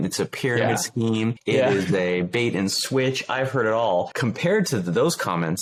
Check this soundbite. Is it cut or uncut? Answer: uncut